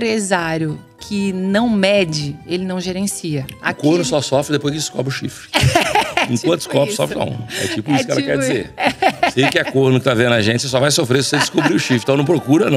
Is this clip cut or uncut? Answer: uncut